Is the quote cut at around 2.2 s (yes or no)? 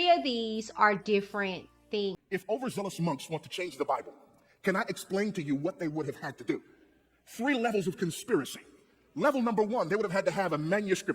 yes